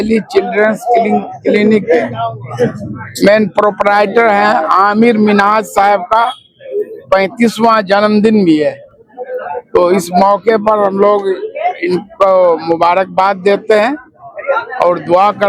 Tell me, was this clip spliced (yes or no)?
no